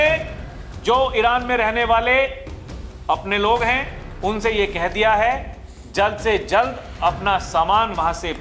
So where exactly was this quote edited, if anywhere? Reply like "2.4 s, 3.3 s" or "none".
none